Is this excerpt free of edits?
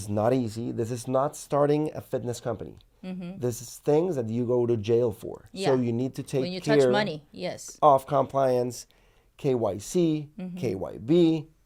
yes; 0 cuts

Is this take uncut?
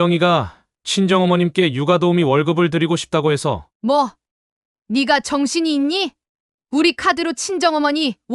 yes; 0 cuts

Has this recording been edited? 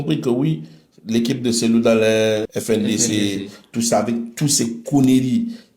yes; 1 cut; at 2.5 s

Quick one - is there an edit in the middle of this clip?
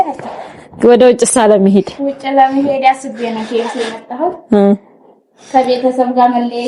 no; 0 cuts

